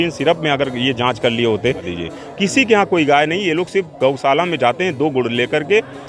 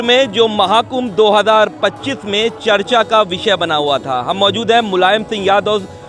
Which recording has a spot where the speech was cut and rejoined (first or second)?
first